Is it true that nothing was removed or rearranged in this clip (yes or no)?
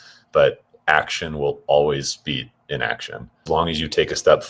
no